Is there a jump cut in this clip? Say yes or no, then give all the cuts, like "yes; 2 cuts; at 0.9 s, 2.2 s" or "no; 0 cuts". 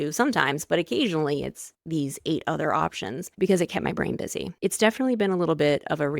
yes; 2 cuts; at 3.3 s, 4.5 s